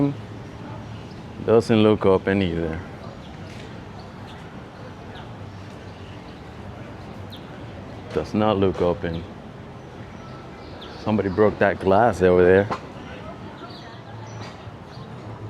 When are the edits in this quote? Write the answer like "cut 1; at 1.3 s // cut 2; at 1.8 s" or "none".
cut 1; at 14.0 s